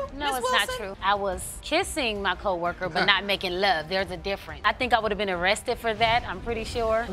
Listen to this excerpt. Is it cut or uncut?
uncut